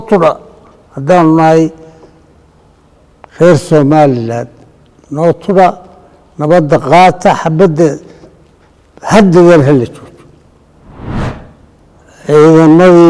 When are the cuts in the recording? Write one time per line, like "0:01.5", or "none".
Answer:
0:11.2